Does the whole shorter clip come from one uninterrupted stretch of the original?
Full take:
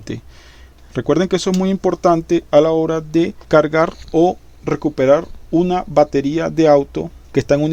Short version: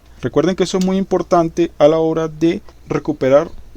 no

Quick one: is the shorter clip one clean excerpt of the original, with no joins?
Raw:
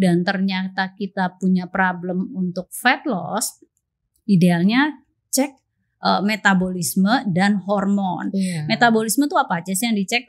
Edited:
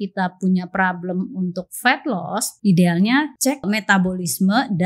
no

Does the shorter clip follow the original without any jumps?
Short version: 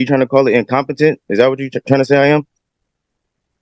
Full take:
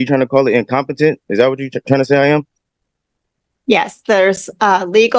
yes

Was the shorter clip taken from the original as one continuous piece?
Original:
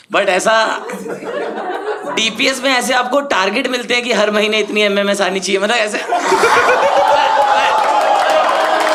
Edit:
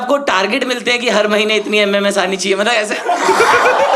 yes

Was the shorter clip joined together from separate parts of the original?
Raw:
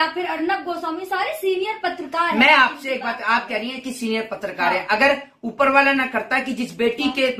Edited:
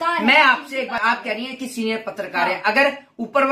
yes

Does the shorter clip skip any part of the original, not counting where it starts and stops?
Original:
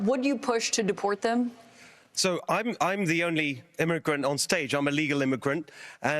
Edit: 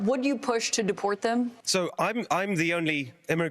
yes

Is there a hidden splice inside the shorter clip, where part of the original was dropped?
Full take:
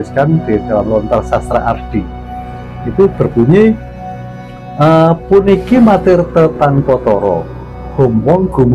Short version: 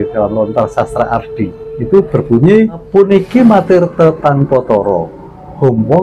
yes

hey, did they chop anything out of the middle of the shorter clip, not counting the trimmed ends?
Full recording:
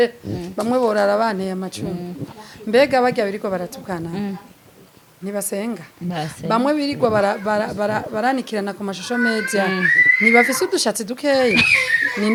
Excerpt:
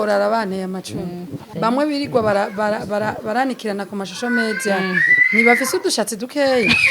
yes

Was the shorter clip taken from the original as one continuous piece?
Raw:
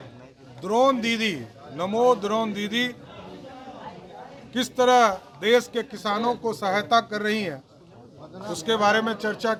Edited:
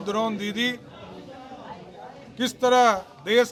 yes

